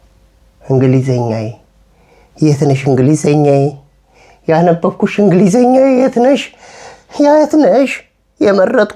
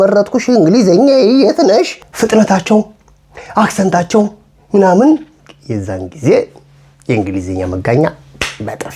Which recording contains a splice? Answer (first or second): second